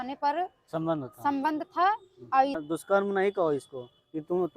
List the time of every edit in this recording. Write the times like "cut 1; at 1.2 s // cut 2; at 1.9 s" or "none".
cut 1; at 2.6 s